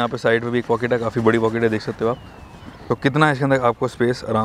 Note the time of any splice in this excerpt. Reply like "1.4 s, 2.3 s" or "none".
2.8 s